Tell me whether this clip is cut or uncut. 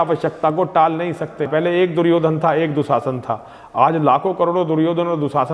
cut